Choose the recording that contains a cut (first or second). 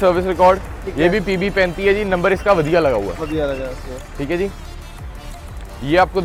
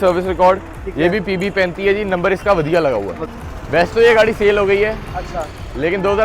second